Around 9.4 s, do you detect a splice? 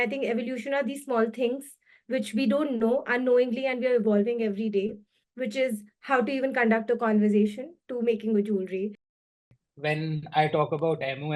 yes; 1 cut; at 9.4 s

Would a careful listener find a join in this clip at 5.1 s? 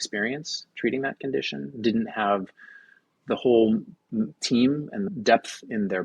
yes; 1 cut; at 5.1 s

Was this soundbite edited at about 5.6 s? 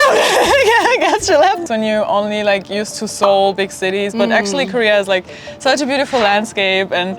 no; 1 cut; at 1.6 s

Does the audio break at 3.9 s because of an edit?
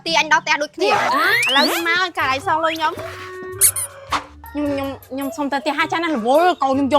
no; 1 cut; at 1.1 s

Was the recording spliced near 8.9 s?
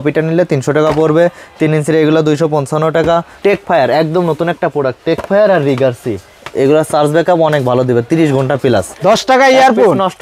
yes; 2 cuts; at 3.3 s, 8.9 s

